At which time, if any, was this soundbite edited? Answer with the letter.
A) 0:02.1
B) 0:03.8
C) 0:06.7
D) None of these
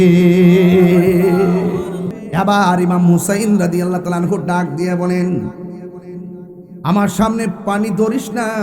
A